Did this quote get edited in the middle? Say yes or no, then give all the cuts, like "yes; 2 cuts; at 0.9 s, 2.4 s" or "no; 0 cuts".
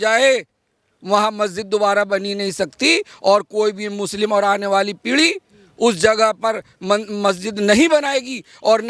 no; 0 cuts